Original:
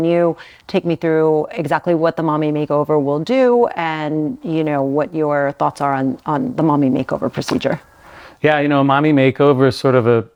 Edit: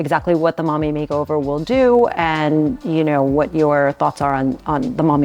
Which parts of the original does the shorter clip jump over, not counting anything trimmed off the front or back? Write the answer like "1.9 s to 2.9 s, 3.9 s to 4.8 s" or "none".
none